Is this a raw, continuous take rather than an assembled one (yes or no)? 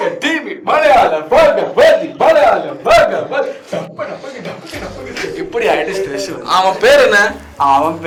yes